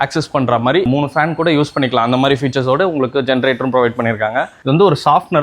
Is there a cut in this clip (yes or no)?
yes